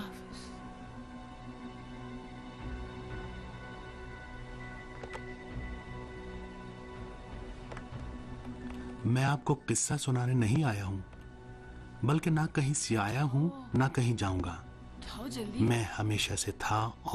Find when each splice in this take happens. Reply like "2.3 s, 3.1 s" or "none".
15.9 s

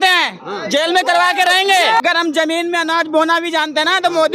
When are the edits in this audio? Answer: 2.0 s

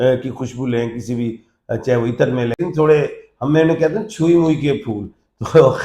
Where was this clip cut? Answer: 2.6 s

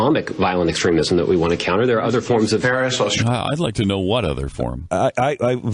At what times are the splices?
none

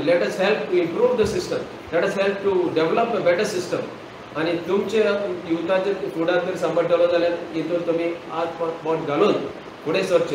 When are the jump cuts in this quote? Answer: none

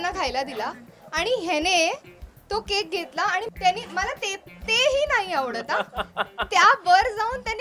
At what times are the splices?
3.5 s

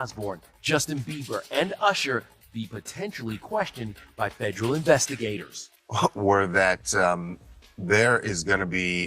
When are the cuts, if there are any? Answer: 5.6 s

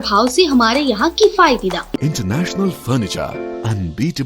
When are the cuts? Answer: 2.0 s

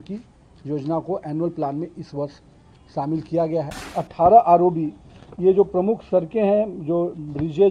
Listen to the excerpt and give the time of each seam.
3.8 s

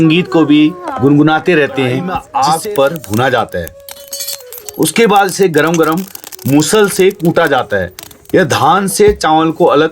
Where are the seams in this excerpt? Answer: 2.1 s

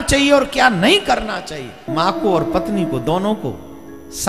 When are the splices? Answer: 1.8 s

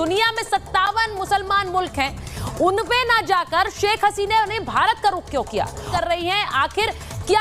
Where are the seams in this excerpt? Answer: 5.9 s

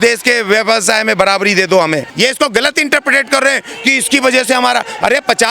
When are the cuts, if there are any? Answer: 2.1 s

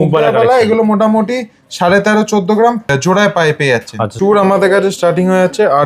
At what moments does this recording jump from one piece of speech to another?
2.9 s, 4.1 s

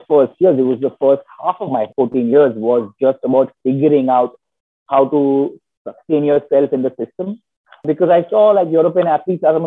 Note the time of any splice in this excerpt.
1.9 s

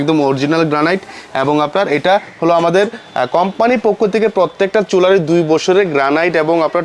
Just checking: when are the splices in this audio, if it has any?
none

